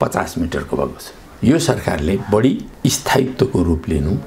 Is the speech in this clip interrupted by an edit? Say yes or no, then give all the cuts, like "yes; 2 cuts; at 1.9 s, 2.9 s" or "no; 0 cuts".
yes; 1 cut; at 1.3 s